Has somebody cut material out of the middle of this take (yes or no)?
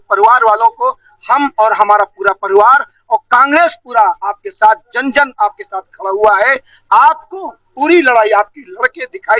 no